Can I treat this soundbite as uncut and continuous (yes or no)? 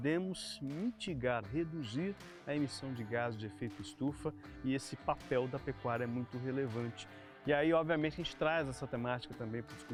yes